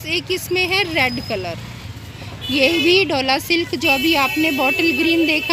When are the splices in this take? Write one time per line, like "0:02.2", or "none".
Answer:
none